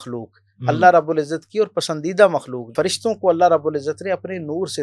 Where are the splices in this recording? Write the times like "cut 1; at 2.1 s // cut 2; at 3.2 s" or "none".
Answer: cut 1; at 2.7 s

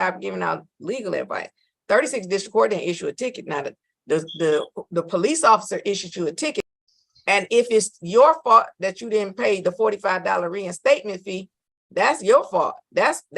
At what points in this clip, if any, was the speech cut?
cut 1; at 6.6 s

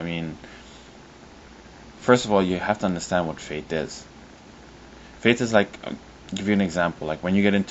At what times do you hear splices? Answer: cut 1; at 3.0 s

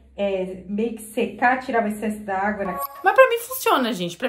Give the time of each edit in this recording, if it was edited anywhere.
cut 1; at 2.8 s

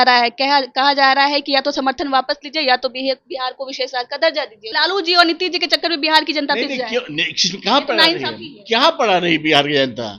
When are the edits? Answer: cut 1; at 4.6 s

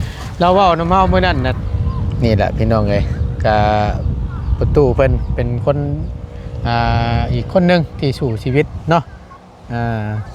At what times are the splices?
cut 1; at 1.5 s

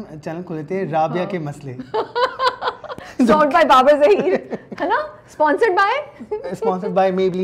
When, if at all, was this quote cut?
none

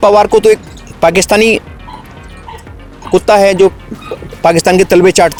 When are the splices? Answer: none

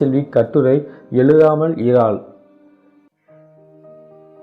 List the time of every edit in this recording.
cut 1; at 2.3 s

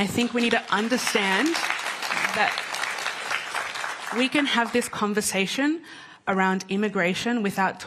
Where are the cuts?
none

